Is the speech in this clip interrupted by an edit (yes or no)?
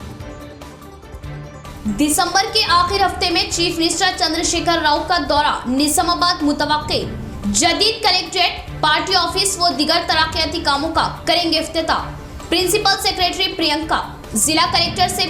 yes